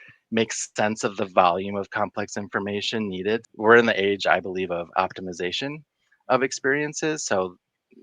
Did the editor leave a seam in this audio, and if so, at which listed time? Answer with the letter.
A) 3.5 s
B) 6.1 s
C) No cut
A